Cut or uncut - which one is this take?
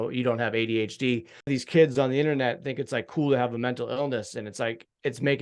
cut